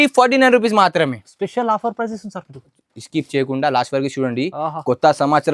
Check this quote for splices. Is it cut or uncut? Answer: uncut